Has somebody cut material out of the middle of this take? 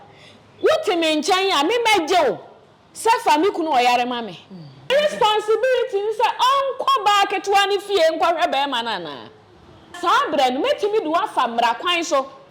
yes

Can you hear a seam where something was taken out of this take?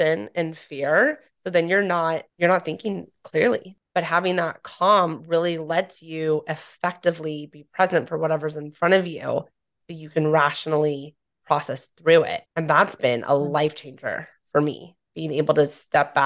yes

